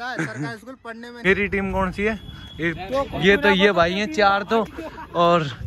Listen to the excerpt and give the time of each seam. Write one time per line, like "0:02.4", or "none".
0:01.1